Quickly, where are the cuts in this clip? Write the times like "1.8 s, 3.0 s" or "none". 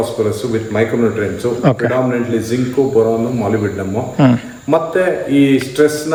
none